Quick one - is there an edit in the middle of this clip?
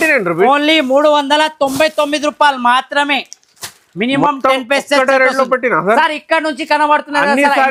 no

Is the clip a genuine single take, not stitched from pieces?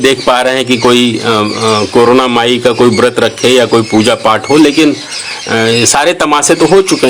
yes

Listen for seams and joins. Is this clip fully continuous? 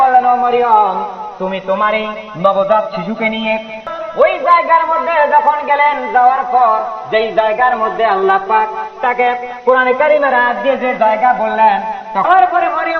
no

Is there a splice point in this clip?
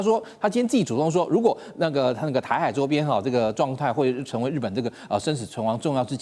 no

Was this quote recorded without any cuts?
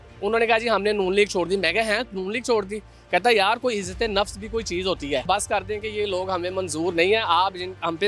no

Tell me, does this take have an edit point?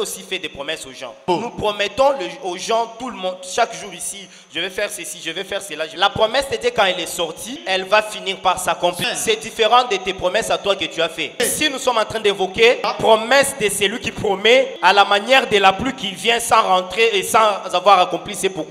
yes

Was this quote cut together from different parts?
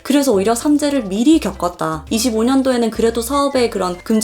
yes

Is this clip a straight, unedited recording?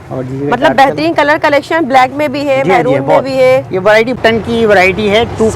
no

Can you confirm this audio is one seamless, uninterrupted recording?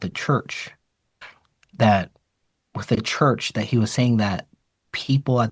yes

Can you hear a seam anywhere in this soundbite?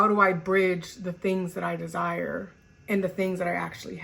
no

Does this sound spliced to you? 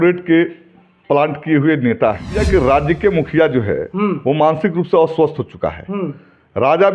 yes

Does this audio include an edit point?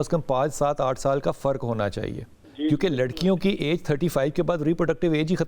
yes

